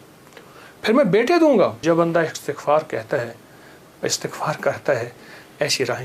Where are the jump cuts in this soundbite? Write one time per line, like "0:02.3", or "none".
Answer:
0:01.8